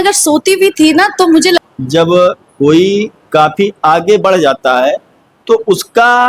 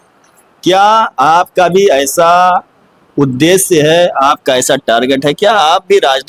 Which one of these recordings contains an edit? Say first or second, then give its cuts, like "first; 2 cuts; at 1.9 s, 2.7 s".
first; 1 cut; at 1.6 s